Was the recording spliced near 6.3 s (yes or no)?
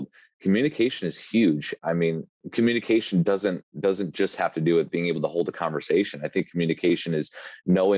no